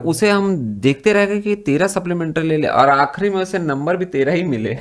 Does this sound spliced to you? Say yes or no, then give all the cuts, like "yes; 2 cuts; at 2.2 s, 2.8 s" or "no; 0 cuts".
no; 0 cuts